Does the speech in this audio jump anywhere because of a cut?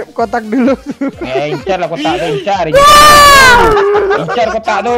no; 0 cuts

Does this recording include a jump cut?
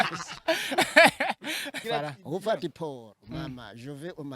yes; 1 cut; at 1.8 s

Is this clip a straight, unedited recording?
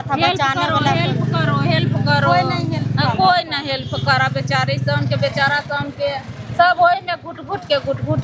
yes; 0 cuts

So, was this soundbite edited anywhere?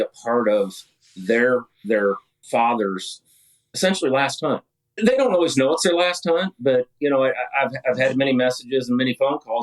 yes; 1 cut; at 4.8 s

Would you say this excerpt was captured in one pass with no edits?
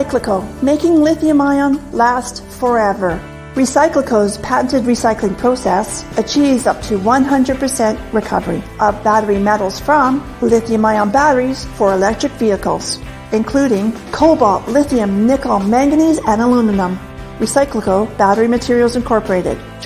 no; 1 cut; at 2.3 s

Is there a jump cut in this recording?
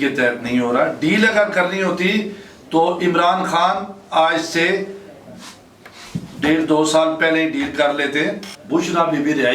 yes; 1 cut; at 8.5 s

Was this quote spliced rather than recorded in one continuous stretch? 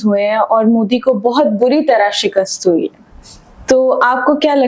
no; 0 cuts

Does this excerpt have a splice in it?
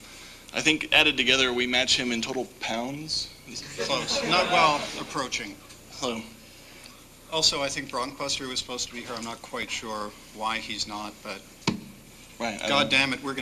no; 0 cuts

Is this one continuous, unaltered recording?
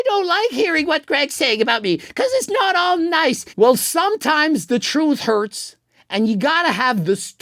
no; 1 cut; at 3.5 s

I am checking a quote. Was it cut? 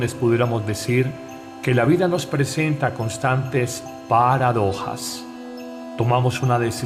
no; 0 cuts

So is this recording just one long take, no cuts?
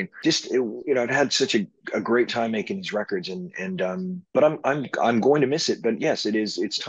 yes; 0 cuts

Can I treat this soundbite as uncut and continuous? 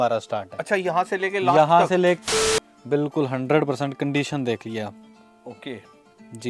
no; 1 cut; at 2.2 s

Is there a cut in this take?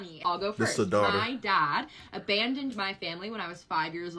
no; 0 cuts

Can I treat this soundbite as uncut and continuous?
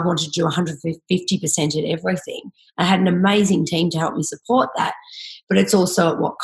yes; 0 cuts

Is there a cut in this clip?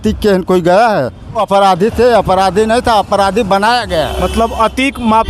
yes; 1 cut; at 1.4 s

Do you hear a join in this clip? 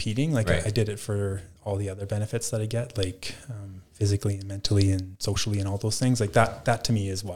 no; 0 cuts

